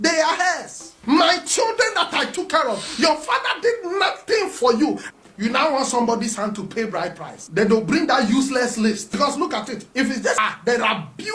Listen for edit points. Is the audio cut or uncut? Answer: cut